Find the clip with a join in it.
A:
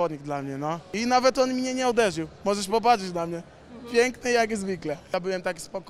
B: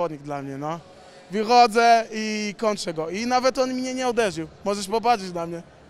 A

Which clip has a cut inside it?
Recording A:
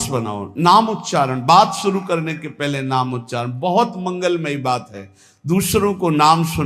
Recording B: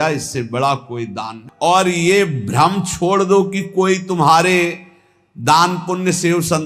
B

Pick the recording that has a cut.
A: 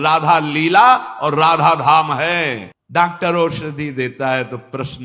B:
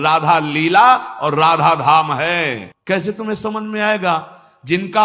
A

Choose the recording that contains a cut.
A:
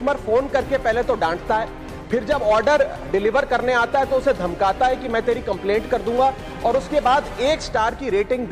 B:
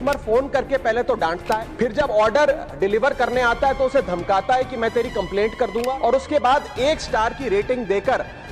B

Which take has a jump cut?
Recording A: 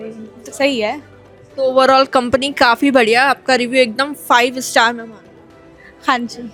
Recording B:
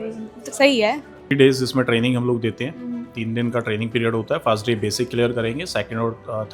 B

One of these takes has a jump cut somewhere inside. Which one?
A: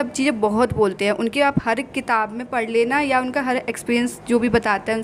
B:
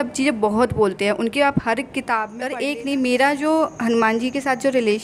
B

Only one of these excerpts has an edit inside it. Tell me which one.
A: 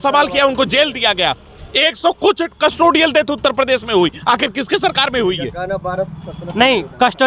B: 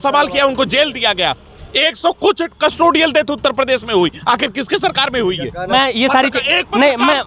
B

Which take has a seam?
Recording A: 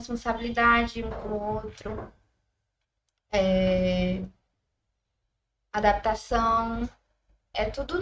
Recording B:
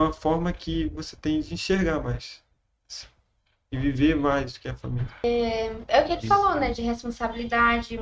B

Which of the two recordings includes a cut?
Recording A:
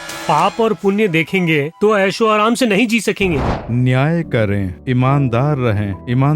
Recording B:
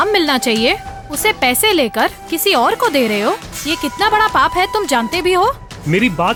A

